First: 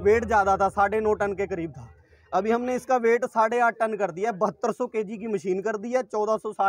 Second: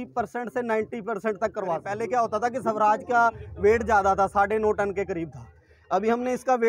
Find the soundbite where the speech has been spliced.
second; 1 cut; at 1.9 s

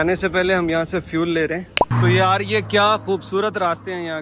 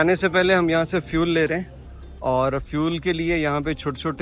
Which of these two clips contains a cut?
first; 1 cut; at 2.0 s

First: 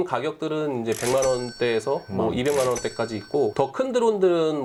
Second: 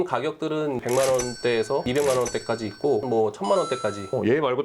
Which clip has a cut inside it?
second; 3 cuts; at 0.8 s, 1.8 s, 3.0 s

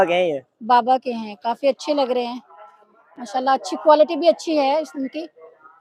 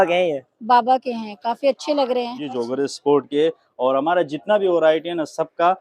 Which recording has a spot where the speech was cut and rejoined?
second; 1 cut; at 2.5 s

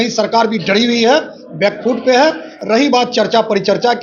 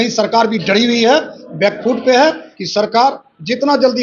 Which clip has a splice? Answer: second; 1 cut; at 2.5 s

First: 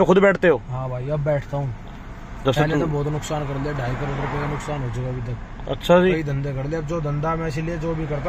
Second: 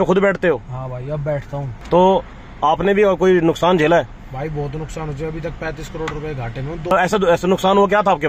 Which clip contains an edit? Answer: second; 2 cuts; at 1.7 s, 6.9 s

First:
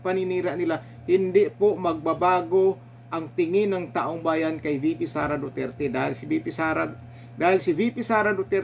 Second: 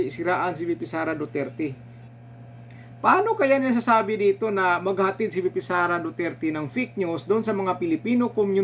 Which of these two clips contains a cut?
second; 1 cut; at 2.0 s

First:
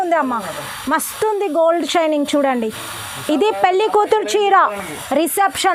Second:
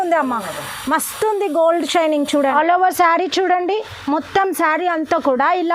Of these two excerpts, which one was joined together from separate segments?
second; 1 cut; at 2.5 s

